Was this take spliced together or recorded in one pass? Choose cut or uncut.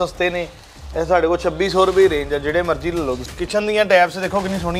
cut